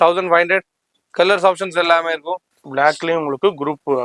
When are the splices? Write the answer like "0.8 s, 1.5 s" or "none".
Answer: 2.5 s